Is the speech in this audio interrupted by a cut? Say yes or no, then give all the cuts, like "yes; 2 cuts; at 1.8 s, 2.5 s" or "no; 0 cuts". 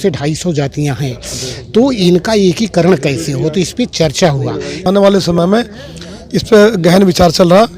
yes; 1 cut; at 4.8 s